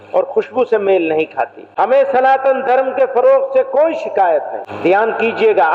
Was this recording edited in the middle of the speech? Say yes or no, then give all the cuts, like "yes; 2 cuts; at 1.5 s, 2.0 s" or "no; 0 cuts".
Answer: yes; 2 cuts; at 1.6 s, 4.6 s